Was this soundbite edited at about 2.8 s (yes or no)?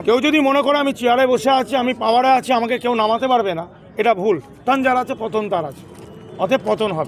no